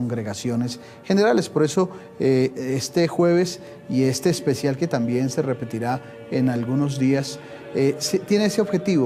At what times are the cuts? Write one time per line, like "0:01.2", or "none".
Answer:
none